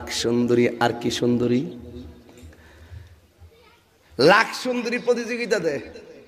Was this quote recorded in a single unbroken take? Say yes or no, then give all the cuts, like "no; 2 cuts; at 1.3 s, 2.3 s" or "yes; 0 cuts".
yes; 0 cuts